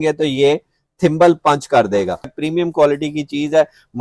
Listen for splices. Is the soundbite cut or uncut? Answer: cut